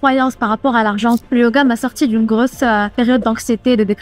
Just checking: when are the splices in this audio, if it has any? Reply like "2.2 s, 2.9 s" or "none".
1.2 s, 2.9 s